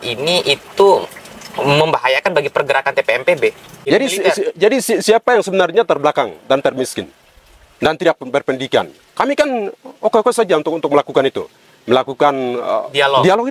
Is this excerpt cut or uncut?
cut